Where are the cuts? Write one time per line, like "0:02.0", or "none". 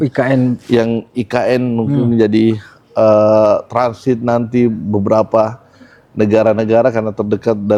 none